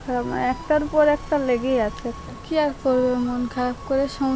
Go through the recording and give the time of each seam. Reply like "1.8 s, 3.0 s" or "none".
2.1 s